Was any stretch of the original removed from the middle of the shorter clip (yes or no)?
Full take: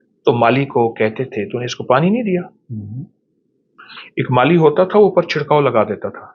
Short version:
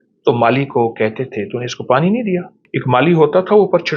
yes